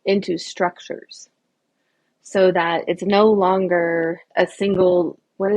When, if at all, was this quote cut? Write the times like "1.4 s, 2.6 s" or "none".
4.2 s